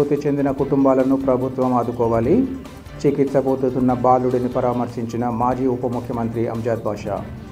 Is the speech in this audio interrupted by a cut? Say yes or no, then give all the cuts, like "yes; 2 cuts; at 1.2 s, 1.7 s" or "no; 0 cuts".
no; 0 cuts